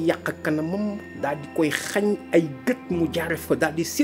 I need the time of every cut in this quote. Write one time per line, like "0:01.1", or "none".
none